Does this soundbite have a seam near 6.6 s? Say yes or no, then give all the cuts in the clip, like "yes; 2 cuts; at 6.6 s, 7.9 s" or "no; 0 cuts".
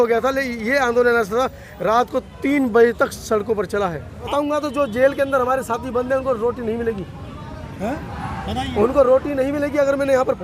no; 1 cut; at 4.2 s